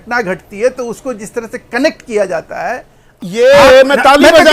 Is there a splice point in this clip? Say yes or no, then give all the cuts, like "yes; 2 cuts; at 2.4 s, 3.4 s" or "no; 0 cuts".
yes; 1 cut; at 3.2 s